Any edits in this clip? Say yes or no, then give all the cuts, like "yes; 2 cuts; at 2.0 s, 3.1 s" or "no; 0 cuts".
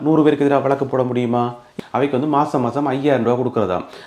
yes; 1 cut; at 1.7 s